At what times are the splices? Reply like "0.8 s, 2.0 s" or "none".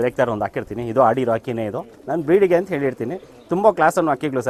none